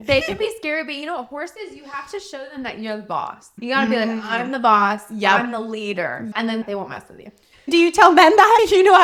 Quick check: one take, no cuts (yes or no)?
yes